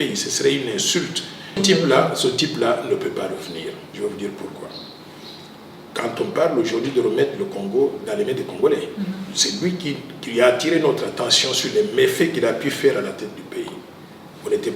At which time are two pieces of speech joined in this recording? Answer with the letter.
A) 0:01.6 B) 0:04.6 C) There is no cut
A